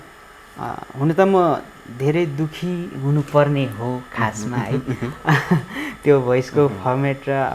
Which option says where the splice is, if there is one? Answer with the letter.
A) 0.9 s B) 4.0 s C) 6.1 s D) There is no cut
D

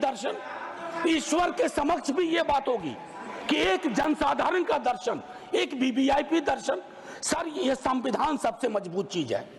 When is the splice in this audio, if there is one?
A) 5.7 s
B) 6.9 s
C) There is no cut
C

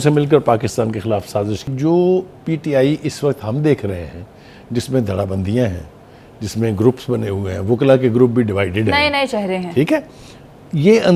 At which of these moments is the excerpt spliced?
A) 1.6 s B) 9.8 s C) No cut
A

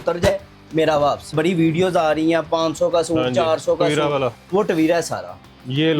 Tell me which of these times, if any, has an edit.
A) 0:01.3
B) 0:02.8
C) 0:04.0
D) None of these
A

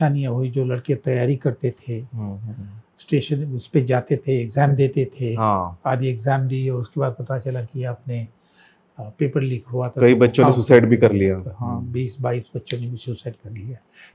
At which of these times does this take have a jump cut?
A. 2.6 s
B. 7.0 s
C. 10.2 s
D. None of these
D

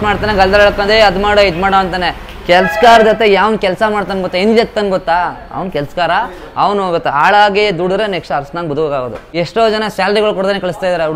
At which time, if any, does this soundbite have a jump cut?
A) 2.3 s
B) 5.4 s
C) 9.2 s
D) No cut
C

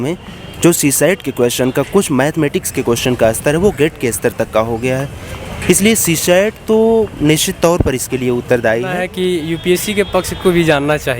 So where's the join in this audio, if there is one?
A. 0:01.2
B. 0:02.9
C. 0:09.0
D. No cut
C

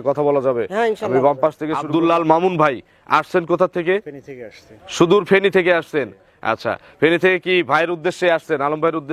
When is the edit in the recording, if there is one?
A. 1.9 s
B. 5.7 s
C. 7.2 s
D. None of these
A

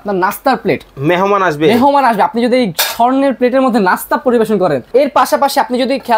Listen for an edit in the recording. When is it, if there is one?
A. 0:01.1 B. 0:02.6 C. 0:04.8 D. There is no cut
C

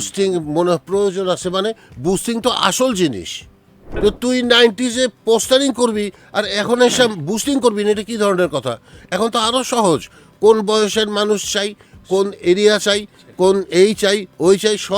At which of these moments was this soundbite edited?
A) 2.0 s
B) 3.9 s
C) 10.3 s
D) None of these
B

